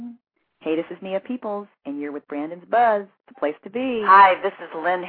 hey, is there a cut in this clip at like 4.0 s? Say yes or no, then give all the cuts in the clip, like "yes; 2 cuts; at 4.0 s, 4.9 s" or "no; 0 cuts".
yes; 1 cut; at 4.0 s